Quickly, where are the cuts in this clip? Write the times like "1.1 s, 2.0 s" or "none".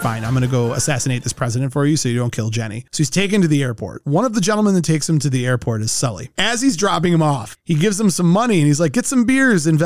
2.8 s, 6.3 s